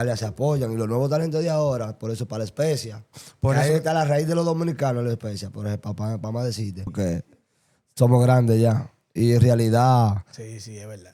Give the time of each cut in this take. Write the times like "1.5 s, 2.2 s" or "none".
6.9 s